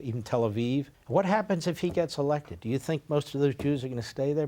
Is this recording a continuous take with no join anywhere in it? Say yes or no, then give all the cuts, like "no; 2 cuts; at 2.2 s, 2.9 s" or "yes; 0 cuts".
no; 1 cut; at 1.0 s